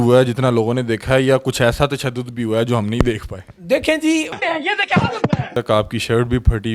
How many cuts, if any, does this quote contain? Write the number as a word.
one